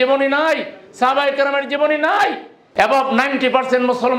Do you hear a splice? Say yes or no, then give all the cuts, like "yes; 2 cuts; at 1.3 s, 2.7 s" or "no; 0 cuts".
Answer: no; 0 cuts